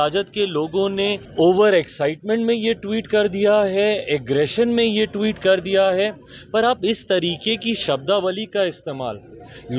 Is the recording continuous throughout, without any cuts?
no; 1 cut; at 1.2 s

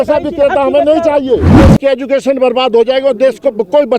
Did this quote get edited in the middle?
yes; 1 cut; at 1.7 s

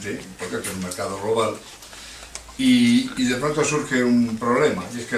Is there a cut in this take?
no; 0 cuts

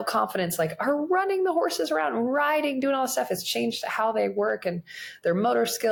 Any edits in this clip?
no; 0 cuts

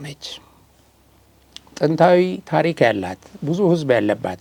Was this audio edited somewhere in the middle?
no; 0 cuts

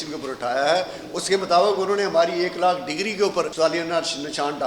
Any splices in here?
yes; 1 cut; at 3.5 s

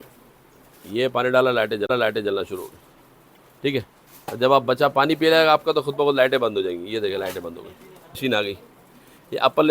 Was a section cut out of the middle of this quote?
yes; 1 cut; at 8.2 s

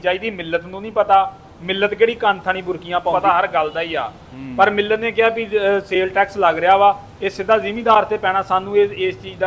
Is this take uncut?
no; 1 cut; at 3.1 s

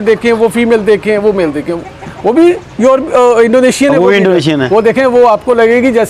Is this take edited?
no; 0 cuts

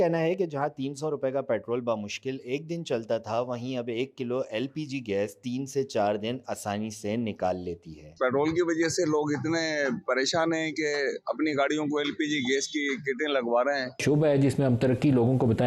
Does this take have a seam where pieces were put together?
yes; 1 cut; at 14.0 s

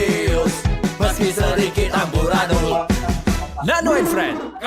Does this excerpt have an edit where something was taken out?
no; 0 cuts

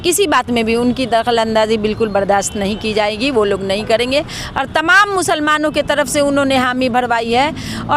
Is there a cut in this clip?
no; 0 cuts

